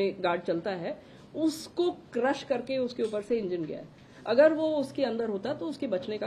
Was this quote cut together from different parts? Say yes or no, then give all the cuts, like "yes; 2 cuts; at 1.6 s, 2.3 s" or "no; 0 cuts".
no; 0 cuts